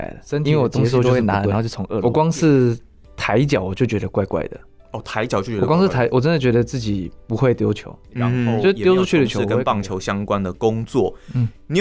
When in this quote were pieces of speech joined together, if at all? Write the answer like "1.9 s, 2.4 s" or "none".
2.0 s, 9.5 s